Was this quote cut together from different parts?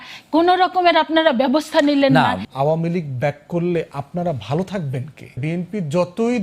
yes; 2 cuts; at 2.4 s, 5.4 s

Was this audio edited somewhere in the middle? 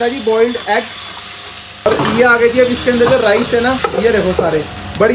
yes; 1 cut; at 1.9 s

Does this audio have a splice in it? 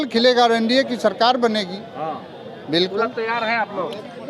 no; 0 cuts

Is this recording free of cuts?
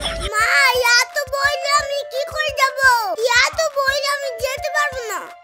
yes; 0 cuts

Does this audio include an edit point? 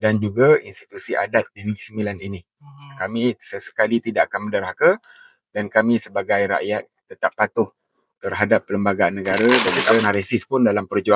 yes; 1 cut; at 10.0 s

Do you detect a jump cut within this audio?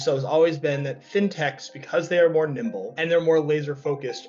yes; 1 cut; at 3.0 s

